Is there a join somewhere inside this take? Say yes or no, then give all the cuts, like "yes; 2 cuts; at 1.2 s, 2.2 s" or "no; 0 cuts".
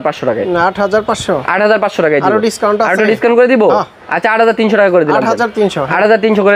no; 0 cuts